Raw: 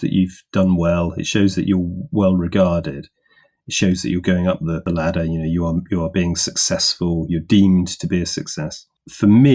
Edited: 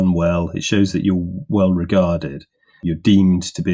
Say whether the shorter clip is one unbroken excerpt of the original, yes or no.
no